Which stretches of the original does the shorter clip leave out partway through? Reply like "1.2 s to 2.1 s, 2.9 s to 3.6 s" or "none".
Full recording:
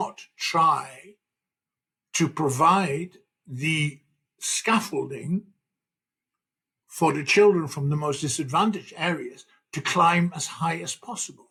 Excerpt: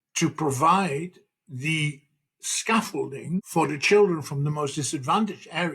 5.5 s to 6.9 s